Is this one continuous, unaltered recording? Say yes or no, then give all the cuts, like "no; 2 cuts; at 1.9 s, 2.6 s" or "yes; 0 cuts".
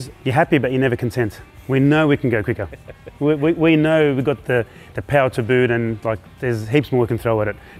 yes; 0 cuts